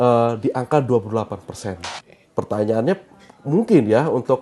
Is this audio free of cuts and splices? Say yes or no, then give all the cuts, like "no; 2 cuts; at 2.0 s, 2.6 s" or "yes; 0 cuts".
no; 1 cut; at 1.9 s